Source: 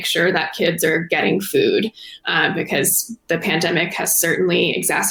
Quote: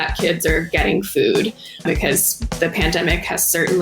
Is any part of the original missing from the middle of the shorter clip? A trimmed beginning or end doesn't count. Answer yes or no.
yes